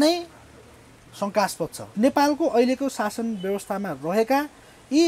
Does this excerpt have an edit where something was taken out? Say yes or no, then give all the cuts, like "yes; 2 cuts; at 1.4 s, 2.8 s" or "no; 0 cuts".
yes; 1 cut; at 1.9 s